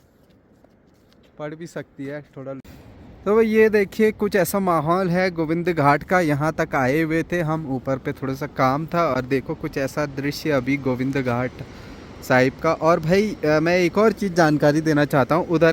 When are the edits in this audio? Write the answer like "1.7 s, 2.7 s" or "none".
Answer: 2.6 s